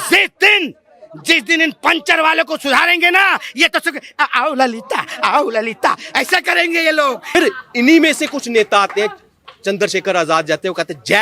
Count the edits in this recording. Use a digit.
1